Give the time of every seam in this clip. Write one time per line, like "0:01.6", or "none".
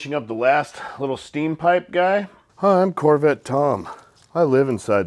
0:02.4